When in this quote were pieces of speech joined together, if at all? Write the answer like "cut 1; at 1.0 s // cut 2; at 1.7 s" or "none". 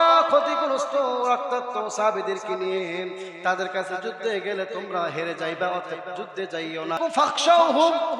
cut 1; at 7.1 s